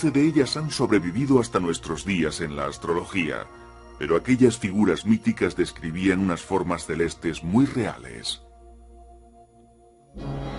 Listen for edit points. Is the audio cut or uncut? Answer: cut